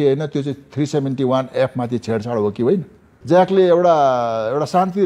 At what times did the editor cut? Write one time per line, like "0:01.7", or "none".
0:03.1